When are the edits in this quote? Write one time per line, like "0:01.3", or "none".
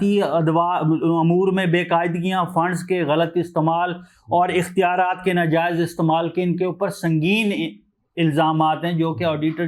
none